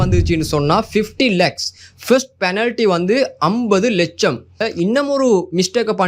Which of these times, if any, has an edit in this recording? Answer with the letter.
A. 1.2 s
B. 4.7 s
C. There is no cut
B